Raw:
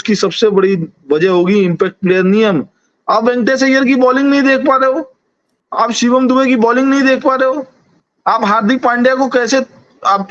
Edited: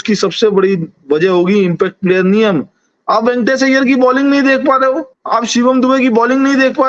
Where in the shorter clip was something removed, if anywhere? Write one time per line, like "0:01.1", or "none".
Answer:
0:05.1